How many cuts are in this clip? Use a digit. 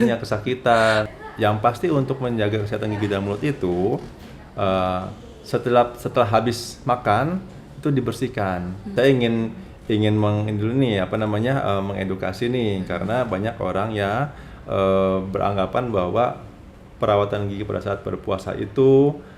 2